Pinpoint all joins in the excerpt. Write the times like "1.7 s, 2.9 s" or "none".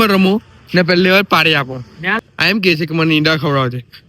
2.1 s